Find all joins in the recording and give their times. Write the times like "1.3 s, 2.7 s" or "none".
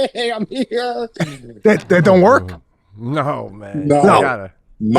none